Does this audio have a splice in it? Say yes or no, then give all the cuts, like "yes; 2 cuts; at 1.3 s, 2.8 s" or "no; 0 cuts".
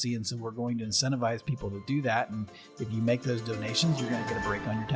no; 0 cuts